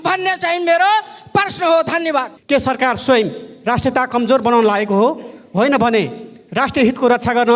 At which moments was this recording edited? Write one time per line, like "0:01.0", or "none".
0:02.4

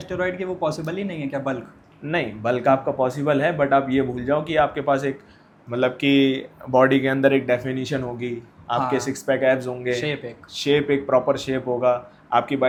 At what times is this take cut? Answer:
none

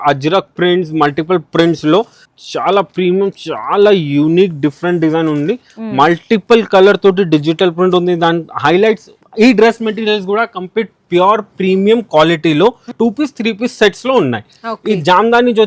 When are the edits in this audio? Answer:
0:02.2
0:09.2
0:12.9

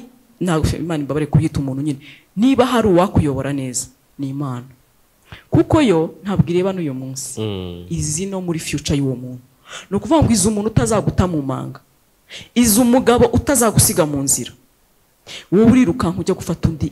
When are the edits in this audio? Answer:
none

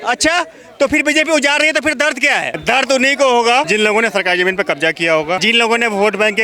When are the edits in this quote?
0:02.5
0:03.7
0:05.4

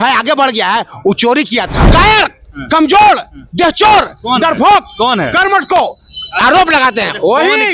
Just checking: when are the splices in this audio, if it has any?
0:01.8

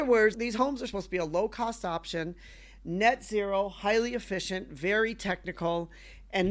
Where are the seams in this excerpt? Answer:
none

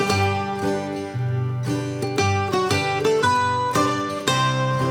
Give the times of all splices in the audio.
none

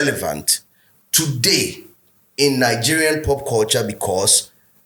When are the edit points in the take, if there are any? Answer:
none

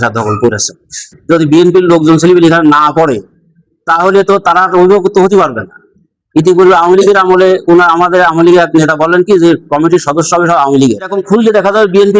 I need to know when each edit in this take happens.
0:01.2
0:11.1

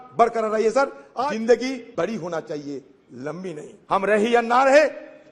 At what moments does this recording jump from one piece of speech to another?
0:01.0
0:01.9
0:03.7

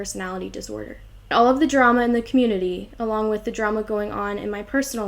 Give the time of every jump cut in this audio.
0:01.3

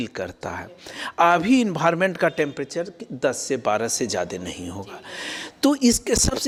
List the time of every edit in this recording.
none

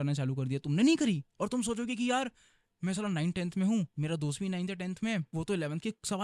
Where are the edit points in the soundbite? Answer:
0:03.9
0:05.3

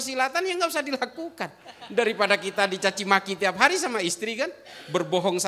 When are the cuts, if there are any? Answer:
none

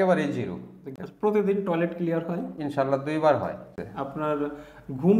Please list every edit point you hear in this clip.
0:01.0
0:03.8

